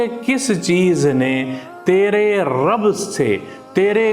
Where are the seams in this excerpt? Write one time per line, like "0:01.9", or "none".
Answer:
none